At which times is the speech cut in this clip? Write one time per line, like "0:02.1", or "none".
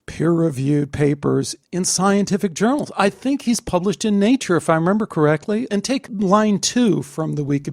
0:05.7

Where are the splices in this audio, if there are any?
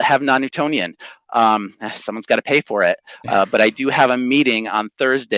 none

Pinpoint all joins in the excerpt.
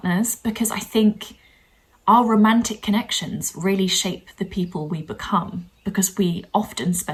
none

